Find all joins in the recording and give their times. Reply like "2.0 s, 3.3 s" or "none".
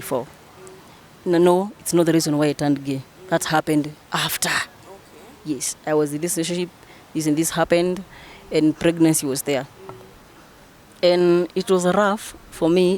none